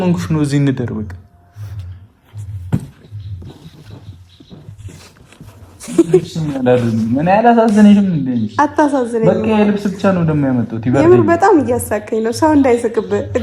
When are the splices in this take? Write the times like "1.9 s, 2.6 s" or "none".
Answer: none